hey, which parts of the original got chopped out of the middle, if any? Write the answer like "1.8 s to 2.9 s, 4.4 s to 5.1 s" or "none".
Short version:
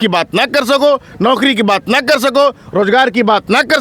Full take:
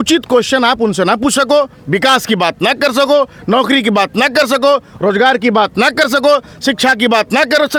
none